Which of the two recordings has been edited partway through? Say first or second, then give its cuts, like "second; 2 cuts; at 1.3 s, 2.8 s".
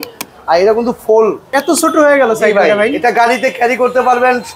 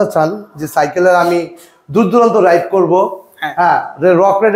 first; 1 cut; at 1.4 s